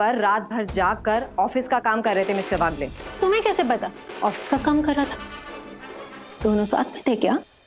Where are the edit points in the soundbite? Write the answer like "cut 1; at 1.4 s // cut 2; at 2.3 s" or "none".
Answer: cut 1; at 4.0 s